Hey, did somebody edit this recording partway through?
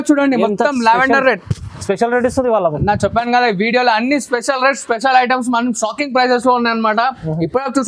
no; 0 cuts

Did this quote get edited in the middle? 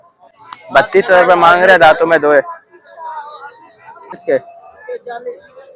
yes; 1 cut; at 4.2 s

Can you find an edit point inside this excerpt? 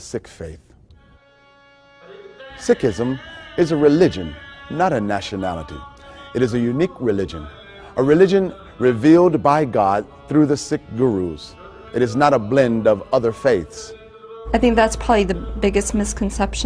yes; 1 cut; at 8.1 s

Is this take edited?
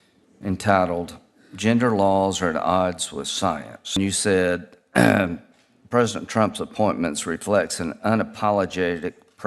yes; 1 cut; at 4.0 s

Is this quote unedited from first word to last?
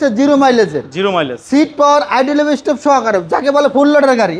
yes; 0 cuts

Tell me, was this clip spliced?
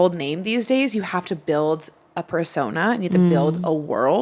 no; 0 cuts

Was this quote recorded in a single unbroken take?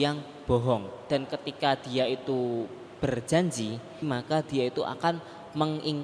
no; 2 cuts; at 1.0 s, 4.1 s

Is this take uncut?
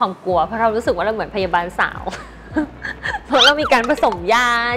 yes; 0 cuts

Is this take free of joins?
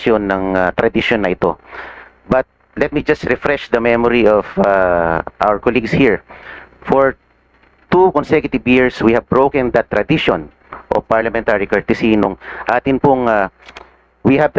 yes; 0 cuts

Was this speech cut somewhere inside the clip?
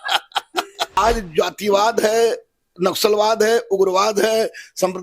yes; 1 cut; at 1.0 s

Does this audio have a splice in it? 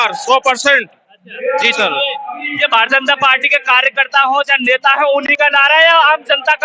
no; 0 cuts

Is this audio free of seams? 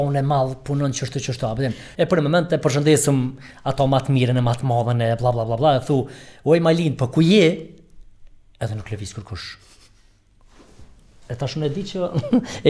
no; 1 cut; at 1.9 s

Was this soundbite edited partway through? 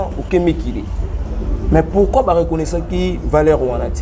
no; 0 cuts

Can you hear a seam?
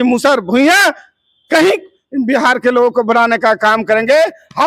no; 0 cuts

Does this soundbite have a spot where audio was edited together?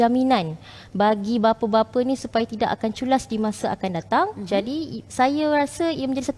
no; 0 cuts

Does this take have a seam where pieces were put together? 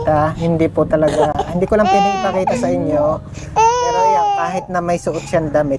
no; 0 cuts

